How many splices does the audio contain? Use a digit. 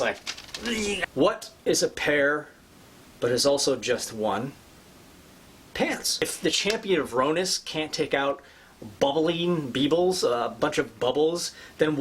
2